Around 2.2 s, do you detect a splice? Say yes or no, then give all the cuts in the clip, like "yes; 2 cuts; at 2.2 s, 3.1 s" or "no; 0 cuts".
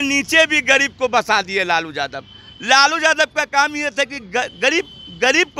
no; 0 cuts